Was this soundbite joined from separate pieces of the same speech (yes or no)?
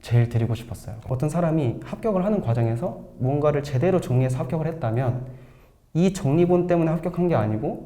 yes